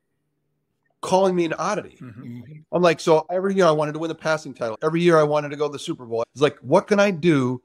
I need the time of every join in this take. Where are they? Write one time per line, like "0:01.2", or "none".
0:04.7
0:06.3